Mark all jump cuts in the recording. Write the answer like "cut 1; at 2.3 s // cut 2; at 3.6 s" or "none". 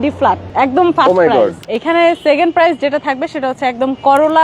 cut 1; at 1.6 s